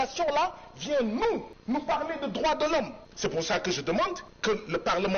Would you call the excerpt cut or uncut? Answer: cut